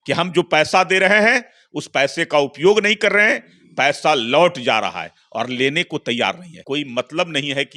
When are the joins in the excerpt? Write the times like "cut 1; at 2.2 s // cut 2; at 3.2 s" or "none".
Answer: cut 1; at 6.5 s